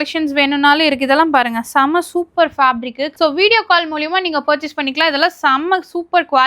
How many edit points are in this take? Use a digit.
1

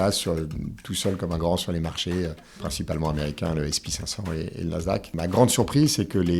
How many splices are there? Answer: 2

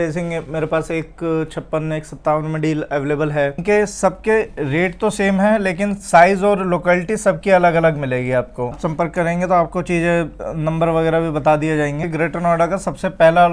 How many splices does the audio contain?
3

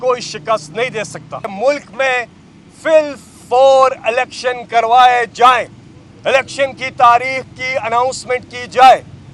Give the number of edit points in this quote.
1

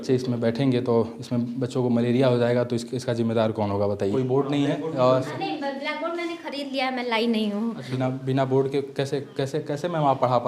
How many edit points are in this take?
2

